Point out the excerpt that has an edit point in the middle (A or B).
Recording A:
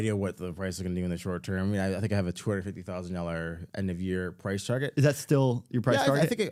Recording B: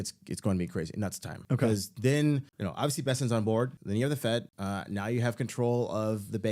B